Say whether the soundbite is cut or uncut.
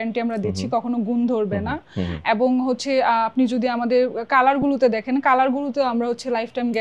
uncut